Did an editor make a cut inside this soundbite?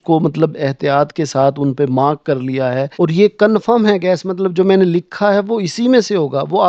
yes; 1 cut; at 2.9 s

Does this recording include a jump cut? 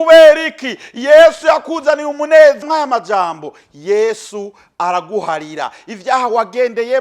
yes; 1 cut; at 2.6 s

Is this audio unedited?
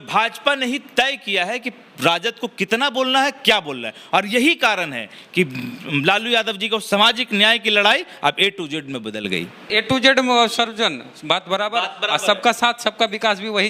no; 1 cut; at 9.6 s

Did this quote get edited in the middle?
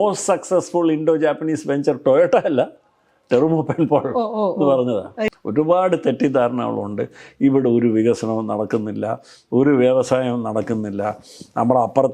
yes; 1 cut; at 5.3 s

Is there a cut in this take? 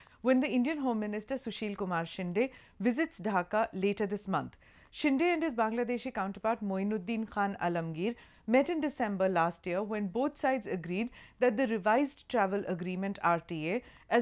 yes; 1 cut; at 8.0 s

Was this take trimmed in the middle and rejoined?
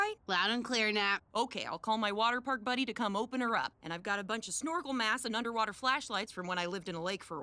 no; 0 cuts

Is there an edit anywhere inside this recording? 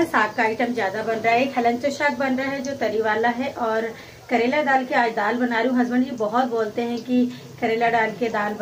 no; 0 cuts

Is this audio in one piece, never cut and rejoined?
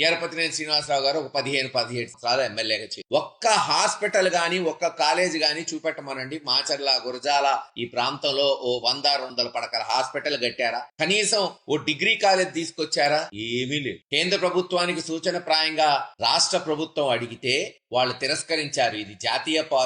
no; 1 cut; at 14.0 s

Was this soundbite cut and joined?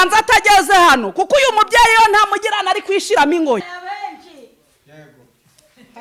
yes; 1 cut; at 3.8 s

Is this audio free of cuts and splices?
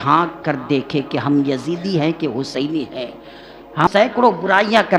no; 1 cut; at 4.1 s

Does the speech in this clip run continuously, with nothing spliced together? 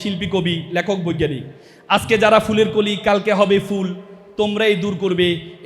yes; 0 cuts

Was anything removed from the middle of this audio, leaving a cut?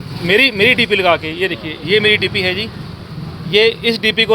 no; 0 cuts

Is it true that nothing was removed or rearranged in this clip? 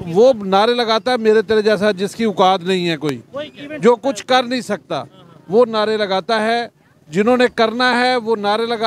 yes; 0 cuts

